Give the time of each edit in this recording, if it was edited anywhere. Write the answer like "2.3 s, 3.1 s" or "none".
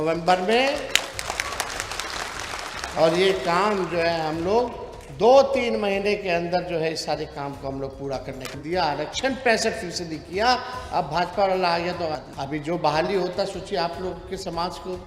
8.5 s, 12.3 s